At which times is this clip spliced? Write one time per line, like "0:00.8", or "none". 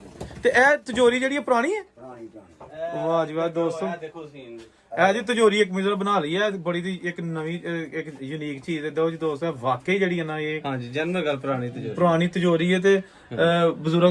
none